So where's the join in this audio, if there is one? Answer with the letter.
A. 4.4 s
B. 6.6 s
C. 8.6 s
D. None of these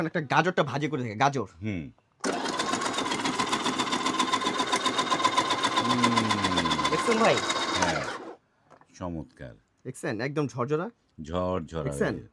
D